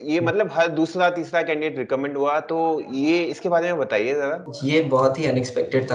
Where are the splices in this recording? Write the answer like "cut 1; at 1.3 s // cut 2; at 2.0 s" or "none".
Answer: cut 1; at 4.5 s